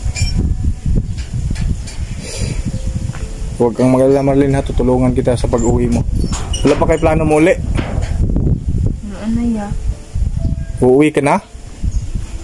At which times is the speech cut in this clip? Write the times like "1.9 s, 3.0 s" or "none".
none